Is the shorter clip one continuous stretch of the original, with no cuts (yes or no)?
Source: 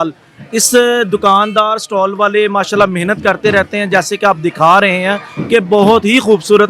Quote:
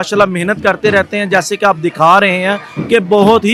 yes